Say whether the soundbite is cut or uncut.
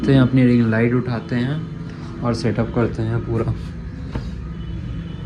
uncut